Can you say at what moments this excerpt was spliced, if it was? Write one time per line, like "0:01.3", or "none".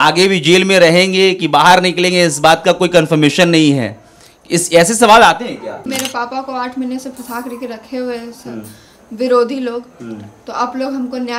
0:05.8